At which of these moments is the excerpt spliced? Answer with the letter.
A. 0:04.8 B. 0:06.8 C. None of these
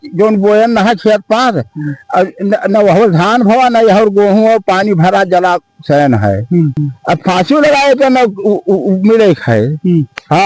B